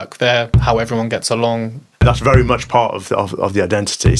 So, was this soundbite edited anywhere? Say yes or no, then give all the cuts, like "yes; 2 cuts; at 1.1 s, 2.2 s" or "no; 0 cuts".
yes; 1 cut; at 2.0 s